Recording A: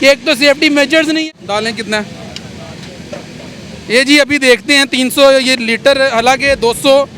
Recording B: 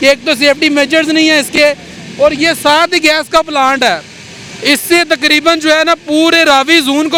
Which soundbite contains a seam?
A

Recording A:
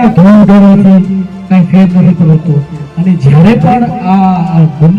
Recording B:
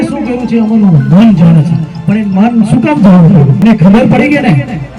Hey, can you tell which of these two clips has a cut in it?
B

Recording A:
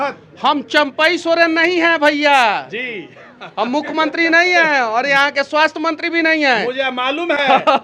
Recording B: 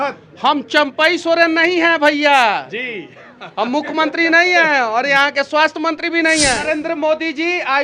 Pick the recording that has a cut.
B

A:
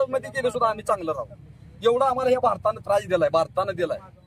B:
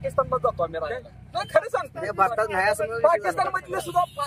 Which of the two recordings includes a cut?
B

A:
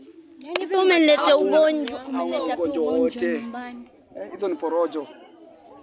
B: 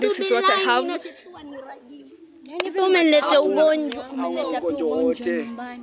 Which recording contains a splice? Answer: B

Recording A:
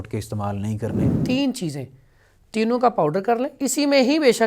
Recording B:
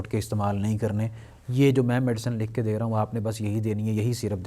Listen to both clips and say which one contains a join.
A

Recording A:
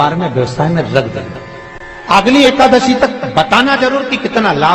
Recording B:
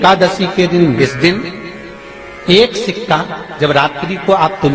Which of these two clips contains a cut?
B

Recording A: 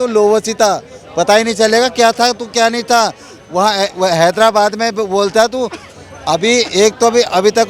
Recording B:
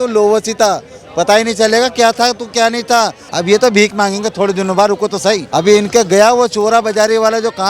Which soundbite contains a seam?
B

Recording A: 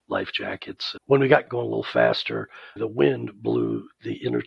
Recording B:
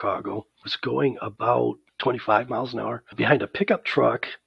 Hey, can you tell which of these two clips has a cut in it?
A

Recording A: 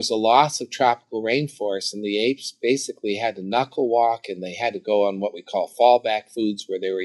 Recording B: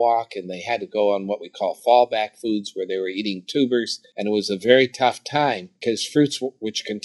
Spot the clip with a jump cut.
B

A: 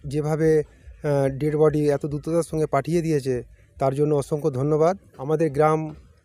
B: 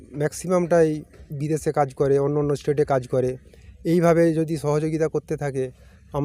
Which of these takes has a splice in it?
A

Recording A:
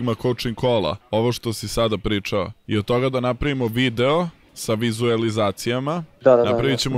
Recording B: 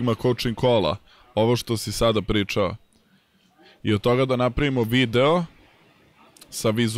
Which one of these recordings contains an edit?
A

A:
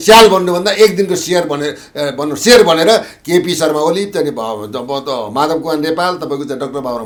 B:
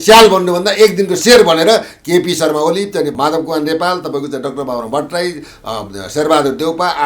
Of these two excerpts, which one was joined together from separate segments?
B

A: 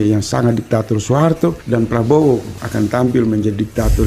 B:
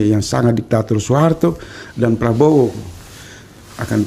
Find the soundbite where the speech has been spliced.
A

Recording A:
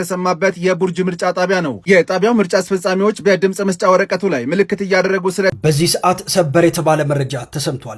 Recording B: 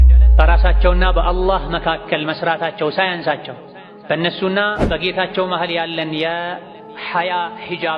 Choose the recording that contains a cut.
A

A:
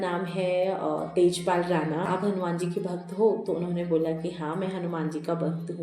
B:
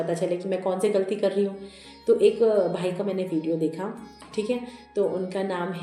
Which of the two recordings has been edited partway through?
A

